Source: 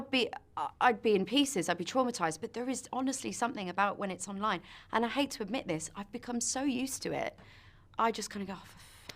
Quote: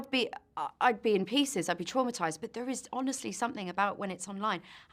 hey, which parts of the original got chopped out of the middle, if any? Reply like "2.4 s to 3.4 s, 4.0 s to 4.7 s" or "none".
none